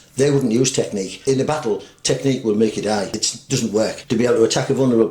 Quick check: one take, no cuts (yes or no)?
no